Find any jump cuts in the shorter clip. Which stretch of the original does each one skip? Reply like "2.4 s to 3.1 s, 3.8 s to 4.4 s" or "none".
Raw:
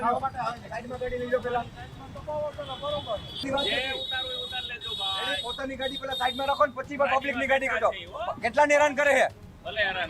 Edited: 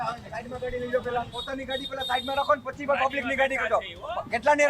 1.8 s to 5.5 s

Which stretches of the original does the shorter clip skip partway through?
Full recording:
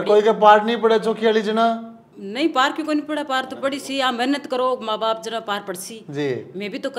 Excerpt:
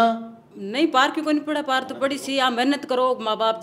none

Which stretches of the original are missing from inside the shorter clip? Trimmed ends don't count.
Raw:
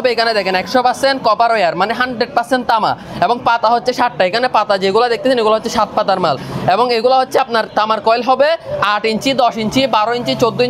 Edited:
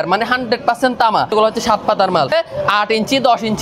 3.0 s to 5.4 s, 6.4 s to 8.5 s

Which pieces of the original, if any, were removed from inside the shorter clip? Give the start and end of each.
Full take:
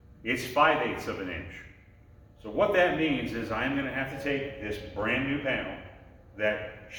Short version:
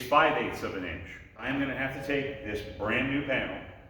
1.9 s to 3.6 s

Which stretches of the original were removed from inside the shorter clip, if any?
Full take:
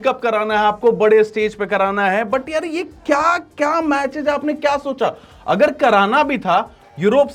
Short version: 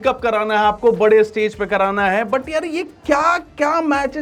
none

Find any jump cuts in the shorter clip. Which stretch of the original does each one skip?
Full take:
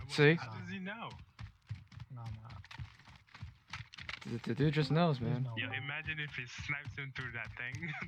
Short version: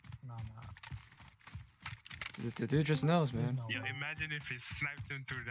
none

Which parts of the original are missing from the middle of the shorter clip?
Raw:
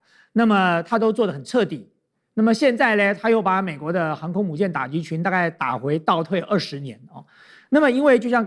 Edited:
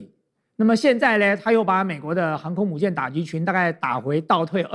none

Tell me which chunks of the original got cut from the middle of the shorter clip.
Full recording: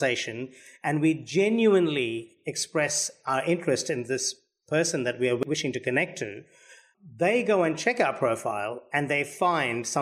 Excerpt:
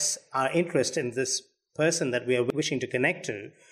none

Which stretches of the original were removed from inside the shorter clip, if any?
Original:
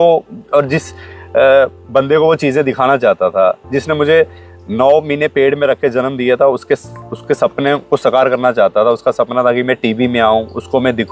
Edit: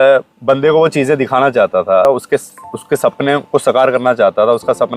3.5 s to 6.4 s

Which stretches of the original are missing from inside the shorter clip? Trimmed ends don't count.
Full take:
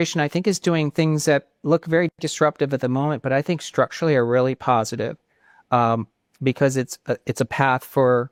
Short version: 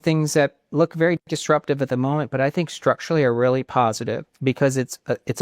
5.2 s to 6.3 s

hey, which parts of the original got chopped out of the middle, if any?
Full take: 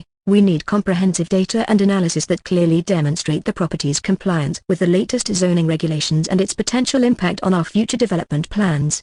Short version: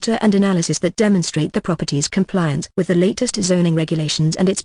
2.5 s to 3.0 s

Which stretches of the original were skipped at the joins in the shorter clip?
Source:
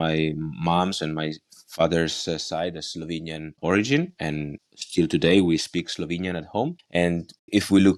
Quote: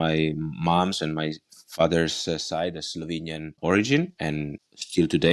none

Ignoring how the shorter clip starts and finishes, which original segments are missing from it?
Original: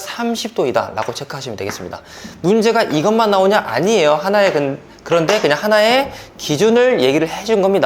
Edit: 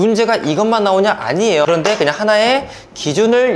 4.1 s to 5.1 s

